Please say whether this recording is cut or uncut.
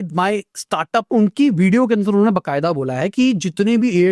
cut